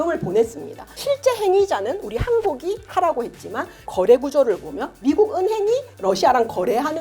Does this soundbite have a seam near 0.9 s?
yes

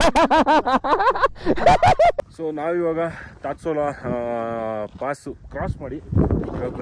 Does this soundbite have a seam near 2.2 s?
yes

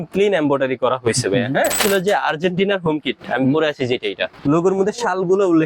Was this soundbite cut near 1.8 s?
yes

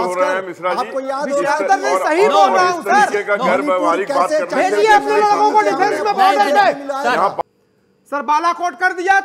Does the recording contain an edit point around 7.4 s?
yes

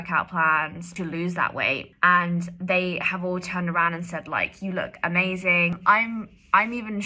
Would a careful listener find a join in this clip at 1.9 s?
yes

